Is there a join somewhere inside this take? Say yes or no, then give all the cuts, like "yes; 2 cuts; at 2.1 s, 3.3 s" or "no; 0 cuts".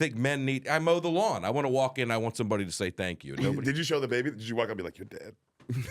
yes; 1 cut; at 3.6 s